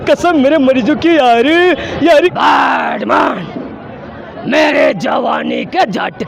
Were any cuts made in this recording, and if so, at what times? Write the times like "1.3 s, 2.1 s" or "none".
2.3 s